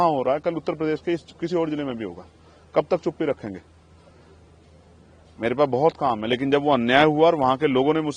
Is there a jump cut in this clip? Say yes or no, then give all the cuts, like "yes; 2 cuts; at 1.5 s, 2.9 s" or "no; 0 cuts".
no; 0 cuts